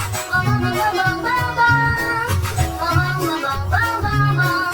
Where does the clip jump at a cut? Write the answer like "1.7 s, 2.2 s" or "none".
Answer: 1.9 s